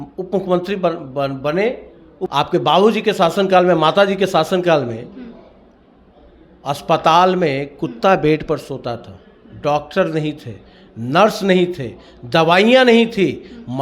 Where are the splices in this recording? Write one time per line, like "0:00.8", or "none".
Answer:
0:02.3

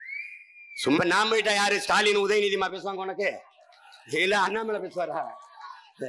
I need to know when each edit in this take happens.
0:01.0

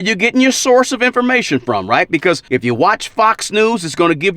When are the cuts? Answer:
0:02.4

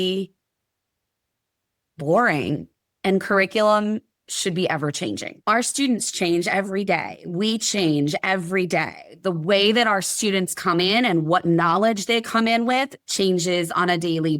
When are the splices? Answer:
0:05.3

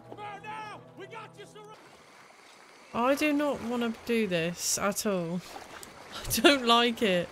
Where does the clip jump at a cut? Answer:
0:01.7

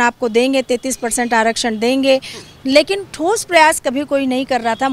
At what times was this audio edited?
none

